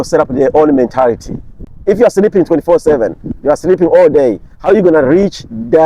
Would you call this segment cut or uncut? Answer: cut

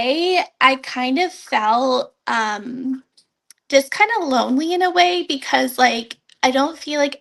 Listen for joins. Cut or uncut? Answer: uncut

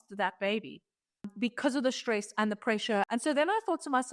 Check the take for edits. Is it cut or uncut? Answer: cut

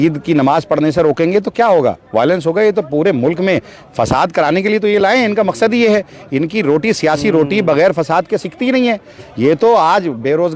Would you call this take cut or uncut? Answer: uncut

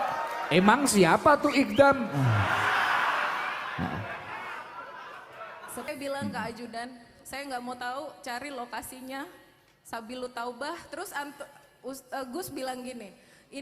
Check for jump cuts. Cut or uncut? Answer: cut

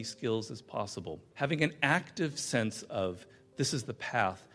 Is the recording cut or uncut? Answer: cut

